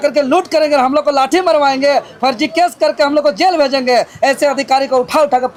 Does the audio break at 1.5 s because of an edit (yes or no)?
no